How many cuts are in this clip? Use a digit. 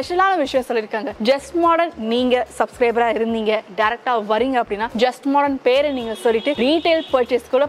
3